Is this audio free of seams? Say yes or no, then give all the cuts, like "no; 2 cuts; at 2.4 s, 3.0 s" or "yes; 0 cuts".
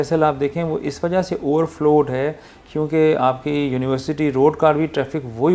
yes; 0 cuts